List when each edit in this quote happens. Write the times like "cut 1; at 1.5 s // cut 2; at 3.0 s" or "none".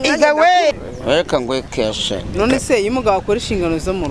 cut 1; at 0.8 s // cut 2; at 2.3 s